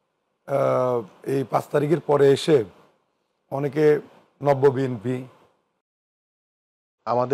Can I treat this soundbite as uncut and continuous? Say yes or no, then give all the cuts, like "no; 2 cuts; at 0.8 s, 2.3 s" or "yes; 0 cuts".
no; 1 cut; at 6.4 s